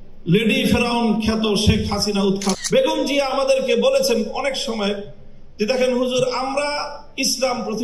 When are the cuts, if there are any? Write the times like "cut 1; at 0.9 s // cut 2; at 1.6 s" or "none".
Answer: cut 1; at 2.6 s